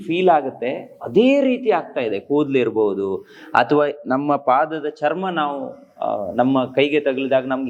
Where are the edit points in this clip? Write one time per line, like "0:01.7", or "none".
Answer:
none